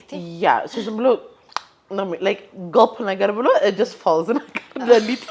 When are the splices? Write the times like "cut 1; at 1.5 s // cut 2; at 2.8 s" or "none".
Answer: none